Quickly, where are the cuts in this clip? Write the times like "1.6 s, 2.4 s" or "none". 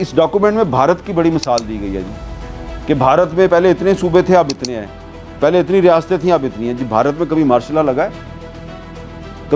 none